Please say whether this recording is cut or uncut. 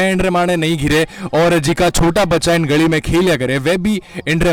uncut